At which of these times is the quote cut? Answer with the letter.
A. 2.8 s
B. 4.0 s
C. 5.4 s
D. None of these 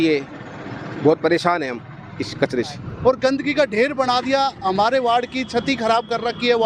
A